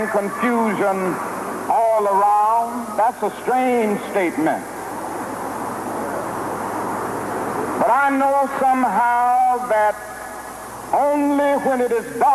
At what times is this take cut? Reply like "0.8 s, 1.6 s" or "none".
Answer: 9.1 s